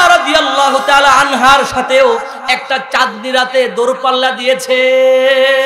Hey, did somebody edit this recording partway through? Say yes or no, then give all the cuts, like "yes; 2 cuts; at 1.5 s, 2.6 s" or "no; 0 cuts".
no; 0 cuts